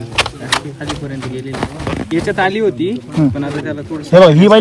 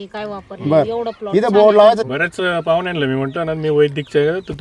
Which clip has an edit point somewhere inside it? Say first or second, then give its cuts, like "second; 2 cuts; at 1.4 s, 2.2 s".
second; 1 cut; at 2.0 s